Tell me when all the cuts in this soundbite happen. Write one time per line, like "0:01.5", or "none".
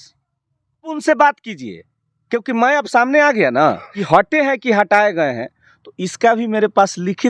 0:00.9
0:04.0